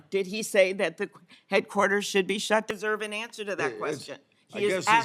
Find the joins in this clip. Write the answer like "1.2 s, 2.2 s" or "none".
2.7 s

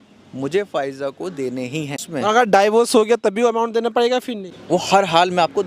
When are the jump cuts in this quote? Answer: 2.0 s, 4.5 s

